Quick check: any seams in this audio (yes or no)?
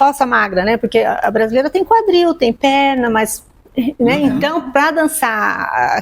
no